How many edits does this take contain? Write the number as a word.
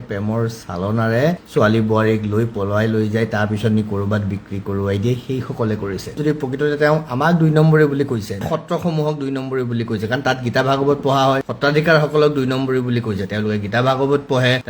one